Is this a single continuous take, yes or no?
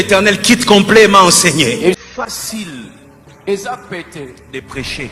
no